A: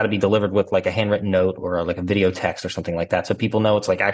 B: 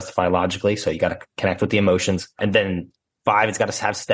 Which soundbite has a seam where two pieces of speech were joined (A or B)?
B